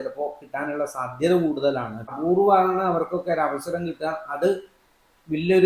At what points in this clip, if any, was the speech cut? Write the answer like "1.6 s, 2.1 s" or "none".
2.1 s